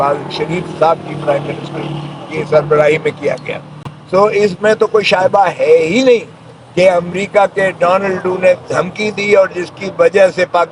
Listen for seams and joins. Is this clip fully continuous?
yes; 0 cuts

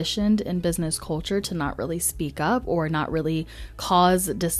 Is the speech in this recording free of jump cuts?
yes; 0 cuts

